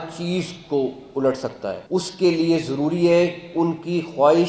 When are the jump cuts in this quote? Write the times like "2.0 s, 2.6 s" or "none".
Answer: 1.8 s